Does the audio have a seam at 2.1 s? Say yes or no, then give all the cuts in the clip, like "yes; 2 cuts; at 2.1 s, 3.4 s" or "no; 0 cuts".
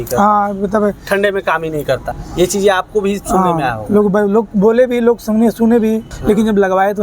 yes; 2 cuts; at 2.1 s, 6.1 s